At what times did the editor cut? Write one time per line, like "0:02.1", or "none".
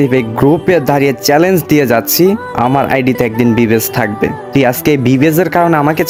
none